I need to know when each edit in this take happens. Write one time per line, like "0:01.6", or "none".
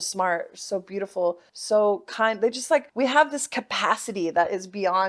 0:01.5
0:02.9